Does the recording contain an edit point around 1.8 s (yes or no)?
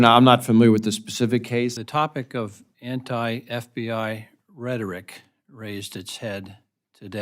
yes